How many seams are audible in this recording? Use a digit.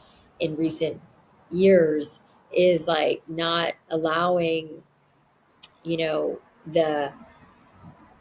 0